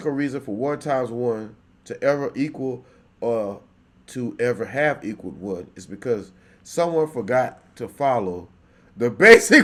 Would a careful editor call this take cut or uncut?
uncut